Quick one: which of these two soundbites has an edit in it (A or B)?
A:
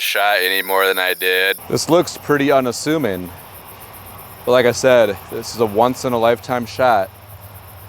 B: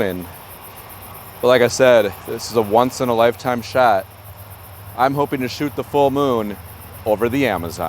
A